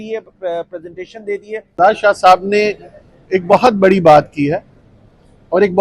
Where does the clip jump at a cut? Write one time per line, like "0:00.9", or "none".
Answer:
0:01.6